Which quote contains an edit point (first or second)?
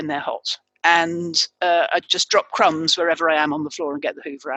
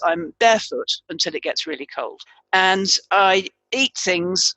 second